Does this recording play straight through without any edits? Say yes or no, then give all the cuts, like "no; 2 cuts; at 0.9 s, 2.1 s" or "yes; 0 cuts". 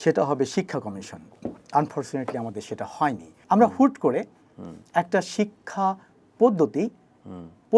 no; 1 cut; at 3.3 s